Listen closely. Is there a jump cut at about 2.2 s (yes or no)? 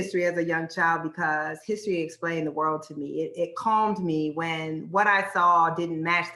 no